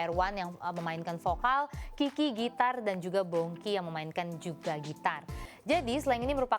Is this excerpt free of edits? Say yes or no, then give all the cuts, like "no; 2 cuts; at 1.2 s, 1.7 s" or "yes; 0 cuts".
no; 1 cut; at 5.4 s